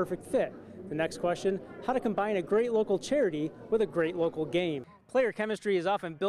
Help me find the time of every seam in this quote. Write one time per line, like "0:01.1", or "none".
0:04.9